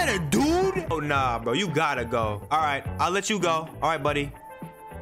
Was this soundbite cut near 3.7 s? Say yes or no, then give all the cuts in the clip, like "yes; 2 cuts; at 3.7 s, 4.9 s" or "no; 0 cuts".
yes; 3 cuts; at 0.9 s, 2.4 s, 3.7 s